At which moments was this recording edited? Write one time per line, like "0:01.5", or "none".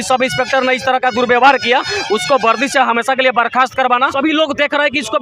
0:04.1